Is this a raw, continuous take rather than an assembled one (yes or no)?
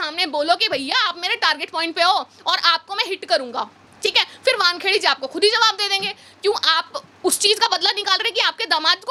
yes